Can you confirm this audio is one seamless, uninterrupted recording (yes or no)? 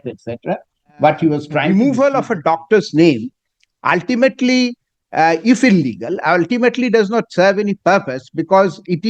no